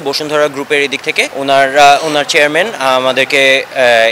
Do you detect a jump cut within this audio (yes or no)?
yes